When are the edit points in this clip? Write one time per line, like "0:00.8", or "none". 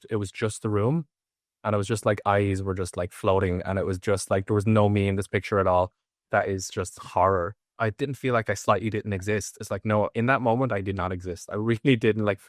0:06.2
0:07.6